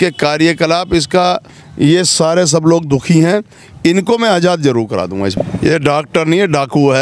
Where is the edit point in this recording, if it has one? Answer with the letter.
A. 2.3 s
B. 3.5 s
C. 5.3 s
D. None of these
C